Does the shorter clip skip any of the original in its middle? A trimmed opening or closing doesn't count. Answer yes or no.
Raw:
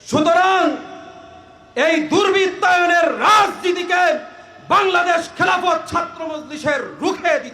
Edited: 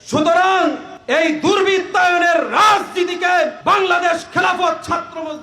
yes